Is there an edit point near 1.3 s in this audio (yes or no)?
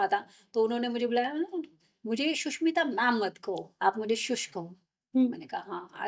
no